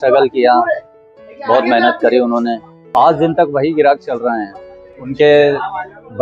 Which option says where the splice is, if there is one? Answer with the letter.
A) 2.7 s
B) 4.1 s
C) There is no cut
A